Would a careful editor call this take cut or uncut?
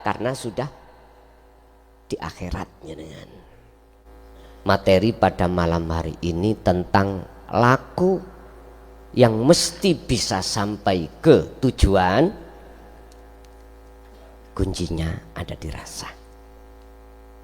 cut